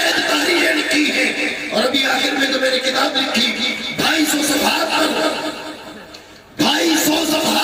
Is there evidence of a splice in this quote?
no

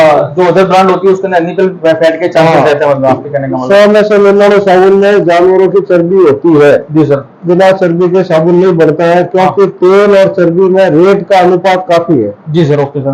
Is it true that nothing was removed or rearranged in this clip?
no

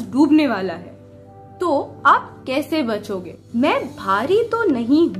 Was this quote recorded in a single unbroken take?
no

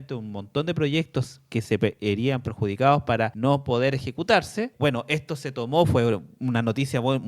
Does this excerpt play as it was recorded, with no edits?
no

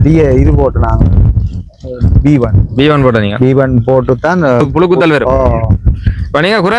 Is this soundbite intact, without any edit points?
no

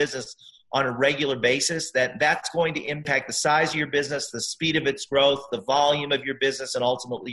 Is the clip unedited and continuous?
no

